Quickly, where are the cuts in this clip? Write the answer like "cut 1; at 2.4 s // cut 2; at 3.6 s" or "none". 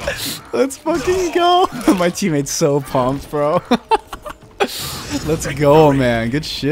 none